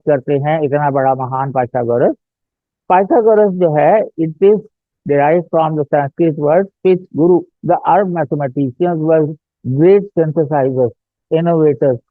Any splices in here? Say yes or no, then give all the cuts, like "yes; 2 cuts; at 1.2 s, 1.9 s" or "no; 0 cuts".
yes; 1 cut; at 7.5 s